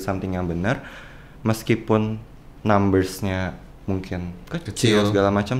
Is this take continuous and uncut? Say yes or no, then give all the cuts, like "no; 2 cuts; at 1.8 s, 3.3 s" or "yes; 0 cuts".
yes; 0 cuts